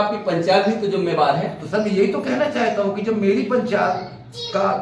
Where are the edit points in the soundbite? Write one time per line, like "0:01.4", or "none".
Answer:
none